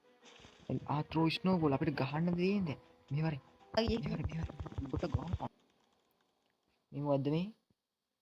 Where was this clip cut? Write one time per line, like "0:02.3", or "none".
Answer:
0:05.5